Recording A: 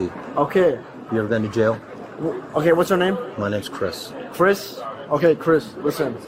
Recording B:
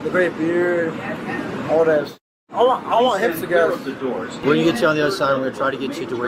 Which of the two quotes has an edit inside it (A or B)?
B